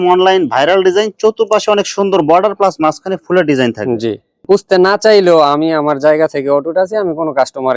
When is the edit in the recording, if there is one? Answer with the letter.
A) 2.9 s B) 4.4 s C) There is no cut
B